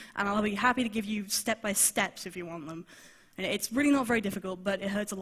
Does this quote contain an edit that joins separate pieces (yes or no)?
yes